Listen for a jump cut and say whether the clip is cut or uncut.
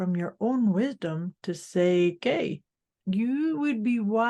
cut